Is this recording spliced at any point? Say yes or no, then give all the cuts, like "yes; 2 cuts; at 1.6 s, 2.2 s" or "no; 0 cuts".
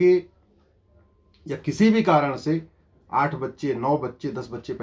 no; 0 cuts